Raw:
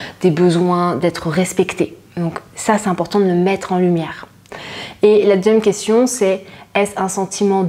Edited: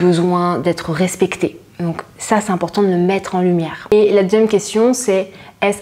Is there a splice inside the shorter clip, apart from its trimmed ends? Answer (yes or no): yes